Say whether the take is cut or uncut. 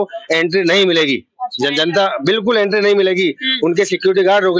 uncut